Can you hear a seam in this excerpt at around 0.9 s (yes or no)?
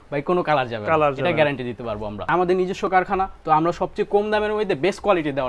no